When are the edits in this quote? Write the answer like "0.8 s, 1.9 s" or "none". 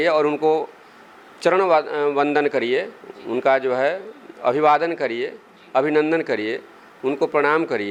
none